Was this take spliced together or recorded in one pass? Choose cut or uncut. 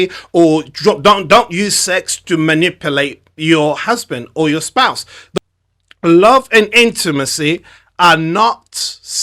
cut